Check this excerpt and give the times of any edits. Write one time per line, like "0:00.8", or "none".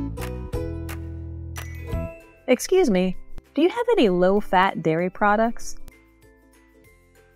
0:02.3